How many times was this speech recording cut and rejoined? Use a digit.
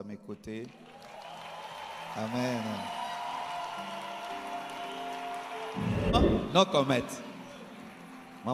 1